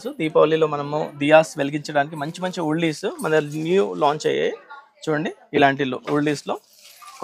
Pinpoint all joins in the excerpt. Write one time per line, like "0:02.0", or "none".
none

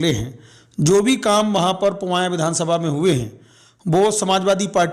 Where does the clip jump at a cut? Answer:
none

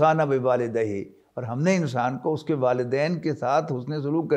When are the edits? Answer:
none

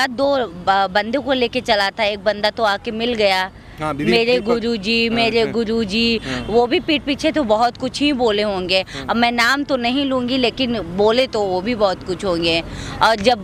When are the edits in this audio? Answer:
none

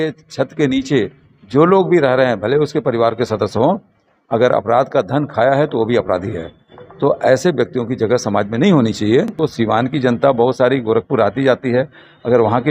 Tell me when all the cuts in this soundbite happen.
0:09.3

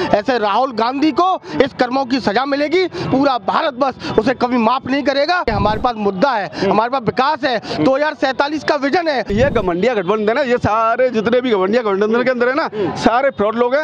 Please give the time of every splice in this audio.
0:05.5
0:09.3

